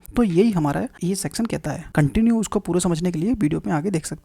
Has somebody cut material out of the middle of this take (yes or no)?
yes